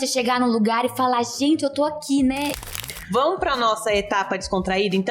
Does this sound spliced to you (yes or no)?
yes